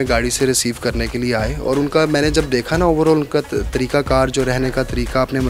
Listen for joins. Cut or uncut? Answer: uncut